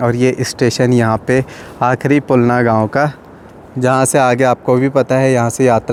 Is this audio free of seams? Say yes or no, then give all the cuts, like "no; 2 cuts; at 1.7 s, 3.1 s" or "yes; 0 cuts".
yes; 0 cuts